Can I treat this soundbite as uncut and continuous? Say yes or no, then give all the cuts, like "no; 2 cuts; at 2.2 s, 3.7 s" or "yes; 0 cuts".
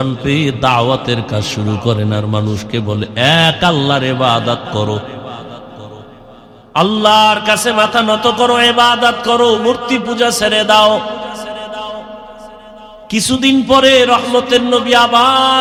yes; 0 cuts